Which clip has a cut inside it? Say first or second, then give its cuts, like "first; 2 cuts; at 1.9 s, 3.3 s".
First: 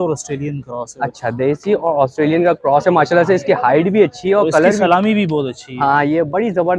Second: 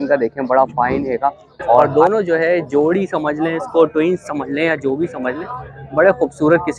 second; 1 cut; at 1.9 s